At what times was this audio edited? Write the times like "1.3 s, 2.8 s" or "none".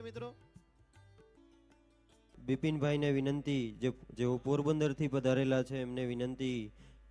2.3 s